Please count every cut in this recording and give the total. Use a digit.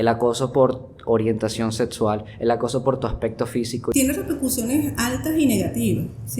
1